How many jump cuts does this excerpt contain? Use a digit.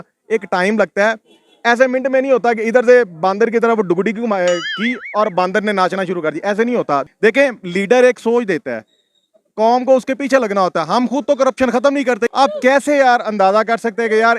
2